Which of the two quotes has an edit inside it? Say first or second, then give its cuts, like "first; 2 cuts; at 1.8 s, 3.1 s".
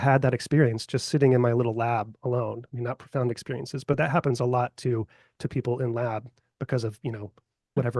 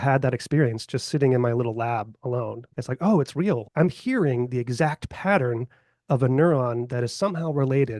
second; 2 cuts; at 2.7 s, 3.7 s